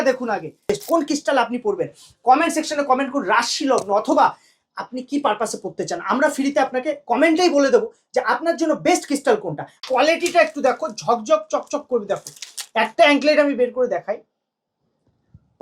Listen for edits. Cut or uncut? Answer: cut